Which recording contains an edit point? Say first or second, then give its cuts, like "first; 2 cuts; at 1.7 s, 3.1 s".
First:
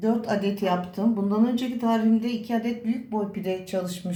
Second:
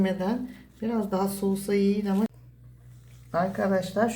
second; 1 cut; at 2.3 s